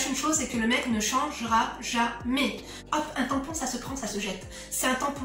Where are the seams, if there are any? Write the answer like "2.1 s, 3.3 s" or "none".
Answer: 2.7 s